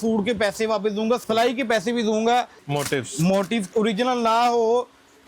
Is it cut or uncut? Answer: cut